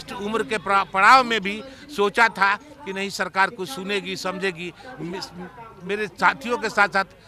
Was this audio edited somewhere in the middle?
no; 0 cuts

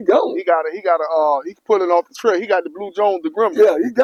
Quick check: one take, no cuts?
yes; 0 cuts

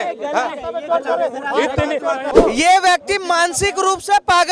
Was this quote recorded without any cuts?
no; 1 cut; at 2.3 s

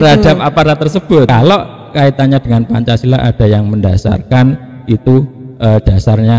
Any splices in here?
yes; 1 cut; at 1.3 s

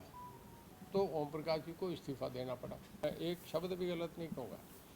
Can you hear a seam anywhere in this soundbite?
yes; 1 cut; at 3.3 s

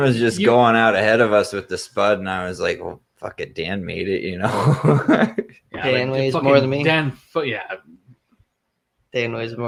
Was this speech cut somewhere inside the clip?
no; 0 cuts

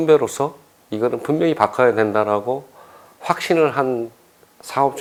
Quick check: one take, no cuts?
yes; 0 cuts

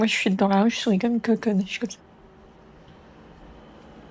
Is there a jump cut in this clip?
no; 0 cuts

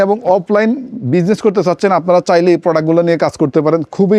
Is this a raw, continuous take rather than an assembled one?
yes; 0 cuts

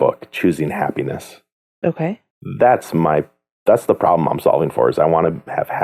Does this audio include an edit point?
no; 0 cuts

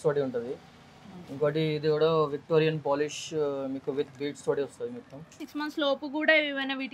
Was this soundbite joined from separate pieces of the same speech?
yes; 1 cut; at 5.5 s

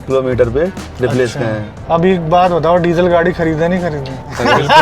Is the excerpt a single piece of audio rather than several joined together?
no; 1 cut; at 1.7 s

